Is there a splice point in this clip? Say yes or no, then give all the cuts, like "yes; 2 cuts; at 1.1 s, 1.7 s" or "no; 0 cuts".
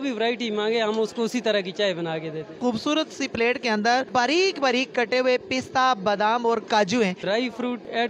yes; 3 cuts; at 2.6 s, 4.1 s, 7.2 s